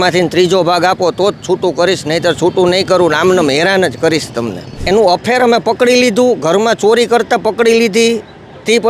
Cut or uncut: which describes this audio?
cut